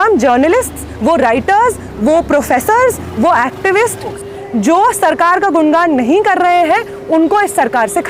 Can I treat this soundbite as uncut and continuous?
no; 1 cut; at 4.2 s

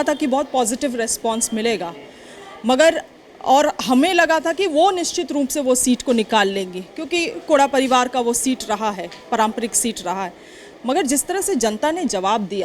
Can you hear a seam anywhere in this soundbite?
no; 0 cuts

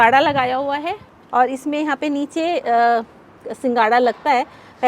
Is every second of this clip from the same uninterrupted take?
no; 1 cut; at 1.1 s

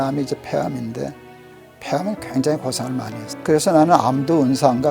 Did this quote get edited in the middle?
yes; 1 cut; at 3.2 s

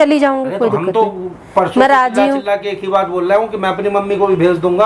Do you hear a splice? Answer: no; 0 cuts

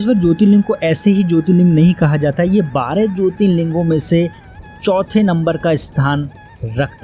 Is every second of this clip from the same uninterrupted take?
yes; 0 cuts

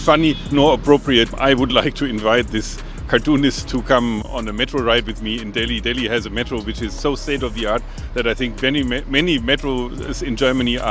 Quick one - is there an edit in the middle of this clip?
yes; 1 cut; at 1.3 s

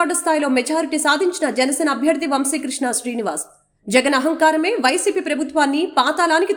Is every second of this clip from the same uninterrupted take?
yes; 0 cuts

